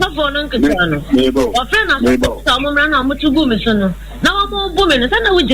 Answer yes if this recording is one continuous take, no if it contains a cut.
yes